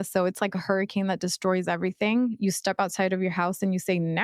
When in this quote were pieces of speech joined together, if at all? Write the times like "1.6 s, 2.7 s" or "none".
none